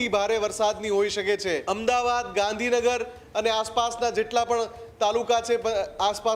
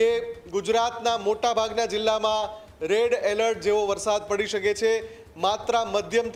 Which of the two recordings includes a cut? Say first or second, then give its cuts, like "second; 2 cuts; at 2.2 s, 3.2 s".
first; 1 cut; at 1.6 s